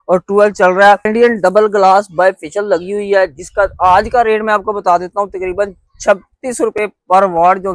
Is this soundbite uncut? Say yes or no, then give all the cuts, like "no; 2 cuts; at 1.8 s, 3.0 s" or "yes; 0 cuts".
no; 1 cut; at 1.1 s